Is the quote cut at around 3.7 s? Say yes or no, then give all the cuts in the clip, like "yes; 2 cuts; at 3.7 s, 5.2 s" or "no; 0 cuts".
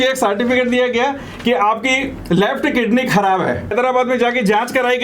yes; 1 cut; at 3.7 s